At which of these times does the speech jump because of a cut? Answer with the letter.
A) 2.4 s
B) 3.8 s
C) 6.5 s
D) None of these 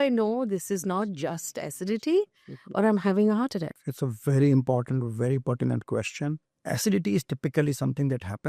C